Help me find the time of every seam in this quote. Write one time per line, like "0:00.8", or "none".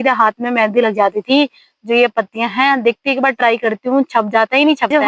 none